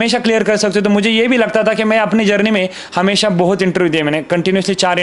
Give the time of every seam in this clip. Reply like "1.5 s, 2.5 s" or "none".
none